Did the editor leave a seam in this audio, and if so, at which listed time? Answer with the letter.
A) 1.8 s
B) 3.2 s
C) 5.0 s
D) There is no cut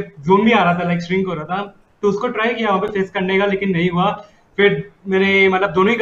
D